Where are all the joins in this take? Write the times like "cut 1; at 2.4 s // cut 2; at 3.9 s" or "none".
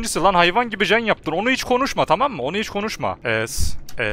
cut 1; at 3.2 s